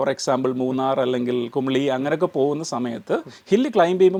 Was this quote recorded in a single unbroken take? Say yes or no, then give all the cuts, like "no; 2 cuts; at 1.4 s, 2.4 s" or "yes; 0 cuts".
yes; 0 cuts